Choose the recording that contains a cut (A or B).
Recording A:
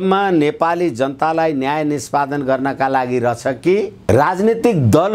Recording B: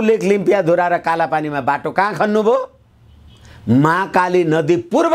A